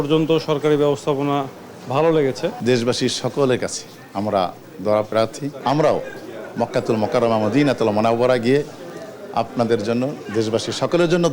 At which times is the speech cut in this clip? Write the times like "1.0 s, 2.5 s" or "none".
2.6 s, 5.5 s